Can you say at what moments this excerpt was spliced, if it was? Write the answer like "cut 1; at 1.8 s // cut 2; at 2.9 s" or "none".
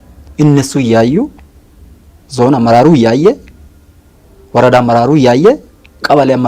none